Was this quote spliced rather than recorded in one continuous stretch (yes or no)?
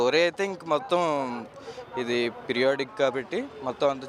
no